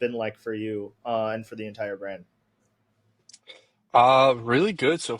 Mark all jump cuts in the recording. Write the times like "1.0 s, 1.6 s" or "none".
none